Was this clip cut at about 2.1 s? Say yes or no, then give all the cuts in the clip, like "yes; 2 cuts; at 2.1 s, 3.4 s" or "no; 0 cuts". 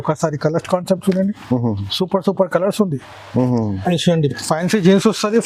no; 1 cut; at 3.8 s